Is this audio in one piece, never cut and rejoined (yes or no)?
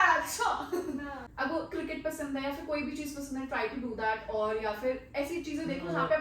no